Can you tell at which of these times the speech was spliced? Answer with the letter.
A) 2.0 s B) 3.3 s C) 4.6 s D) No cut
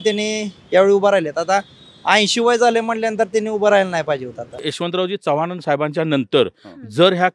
C